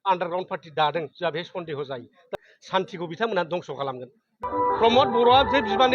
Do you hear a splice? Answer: yes; 2 cuts; at 2.3 s, 4.4 s

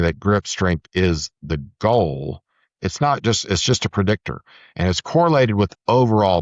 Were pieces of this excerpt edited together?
no; 0 cuts

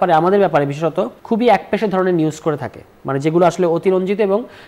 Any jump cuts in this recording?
no; 0 cuts

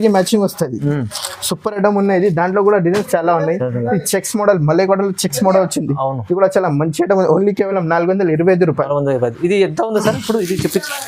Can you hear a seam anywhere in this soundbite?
no; 0 cuts

